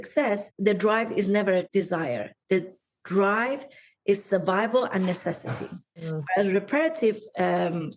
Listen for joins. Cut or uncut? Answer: uncut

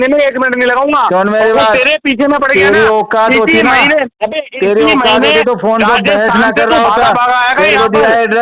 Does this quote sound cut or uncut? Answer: uncut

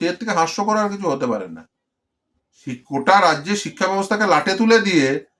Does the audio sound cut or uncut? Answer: uncut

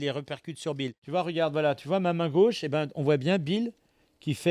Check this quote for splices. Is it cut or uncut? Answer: cut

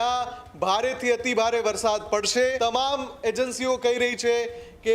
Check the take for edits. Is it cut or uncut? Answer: cut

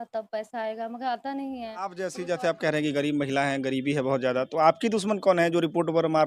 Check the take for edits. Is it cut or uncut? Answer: cut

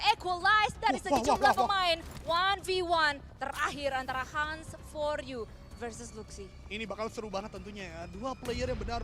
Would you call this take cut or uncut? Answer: uncut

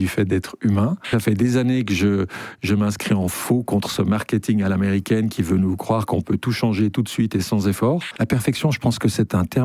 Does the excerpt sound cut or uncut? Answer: cut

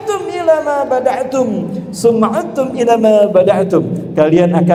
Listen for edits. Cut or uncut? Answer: uncut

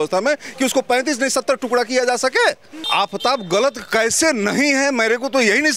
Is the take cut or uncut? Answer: cut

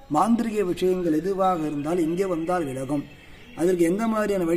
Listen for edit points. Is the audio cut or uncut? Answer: uncut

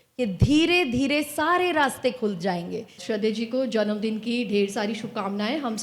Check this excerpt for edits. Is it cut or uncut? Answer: cut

